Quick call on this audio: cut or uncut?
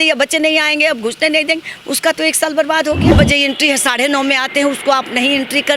cut